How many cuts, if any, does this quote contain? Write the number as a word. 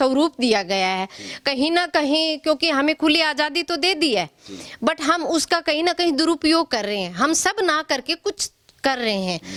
zero